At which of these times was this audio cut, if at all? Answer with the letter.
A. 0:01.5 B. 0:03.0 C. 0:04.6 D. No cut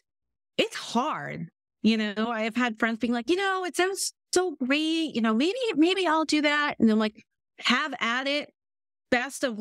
D